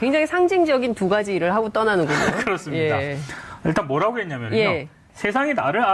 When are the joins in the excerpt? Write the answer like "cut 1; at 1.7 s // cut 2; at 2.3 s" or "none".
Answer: cut 1; at 3.9 s